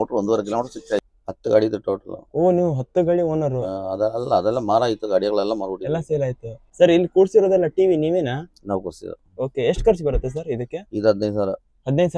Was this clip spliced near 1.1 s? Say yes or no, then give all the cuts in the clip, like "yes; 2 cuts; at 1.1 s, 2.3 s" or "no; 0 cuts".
yes; 2 cuts; at 1.1 s, 6.6 s